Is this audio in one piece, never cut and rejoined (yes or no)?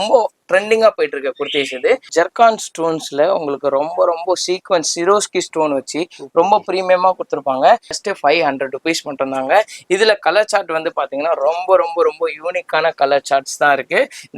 no